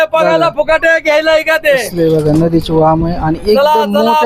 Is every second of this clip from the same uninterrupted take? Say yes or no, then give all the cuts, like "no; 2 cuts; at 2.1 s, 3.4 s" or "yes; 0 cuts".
yes; 0 cuts